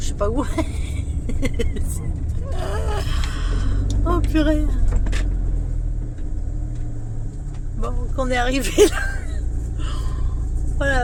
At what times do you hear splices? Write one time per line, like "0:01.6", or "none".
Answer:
none